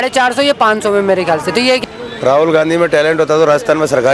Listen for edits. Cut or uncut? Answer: cut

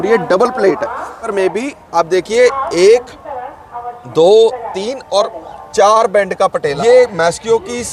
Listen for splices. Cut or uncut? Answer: cut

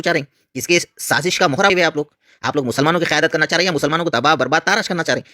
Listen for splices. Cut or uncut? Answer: cut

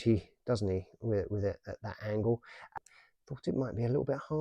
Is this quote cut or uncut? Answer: cut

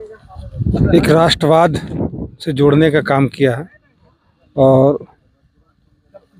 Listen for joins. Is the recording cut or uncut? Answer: uncut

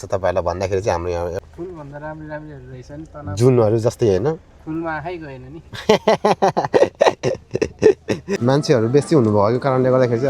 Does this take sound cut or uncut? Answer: cut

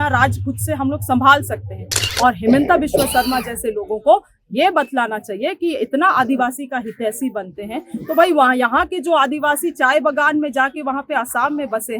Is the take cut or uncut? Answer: cut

